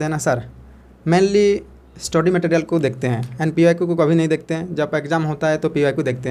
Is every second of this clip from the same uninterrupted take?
yes; 0 cuts

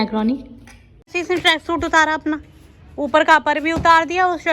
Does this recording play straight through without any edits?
no; 1 cut; at 1.1 s

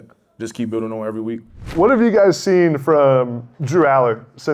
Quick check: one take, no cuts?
no; 1 cut; at 1.7 s

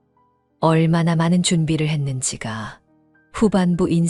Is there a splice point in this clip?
no; 0 cuts

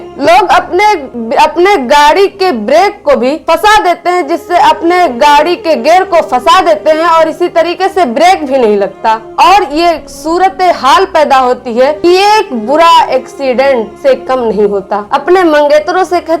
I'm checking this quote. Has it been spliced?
yes; 4 cuts; at 1.1 s, 3.4 s, 12.0 s, 15.1 s

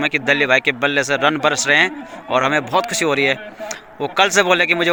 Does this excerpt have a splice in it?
no; 0 cuts

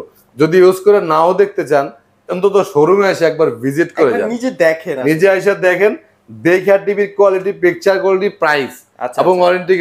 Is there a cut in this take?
no; 0 cuts

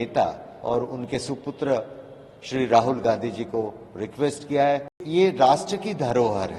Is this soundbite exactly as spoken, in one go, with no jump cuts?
no; 1 cut; at 5.0 s

